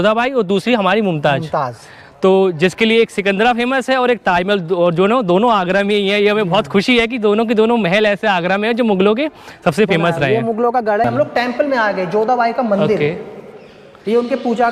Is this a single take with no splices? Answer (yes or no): yes